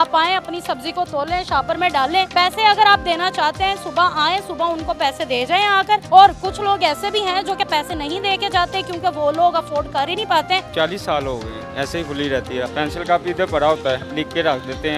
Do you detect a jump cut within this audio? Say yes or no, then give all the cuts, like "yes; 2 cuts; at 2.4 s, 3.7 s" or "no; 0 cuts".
yes; 6 cuts; at 2.3 s, 6.0 s, 10.7 s, 11.6 s, 12.7 s, 14.1 s